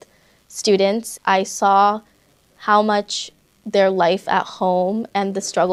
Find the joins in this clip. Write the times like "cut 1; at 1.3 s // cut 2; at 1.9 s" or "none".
cut 1; at 1.1 s